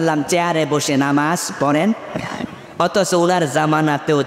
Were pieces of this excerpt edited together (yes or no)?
no